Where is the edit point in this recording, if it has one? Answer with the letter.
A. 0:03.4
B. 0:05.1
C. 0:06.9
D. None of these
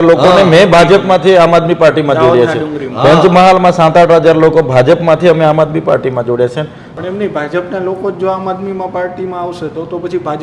C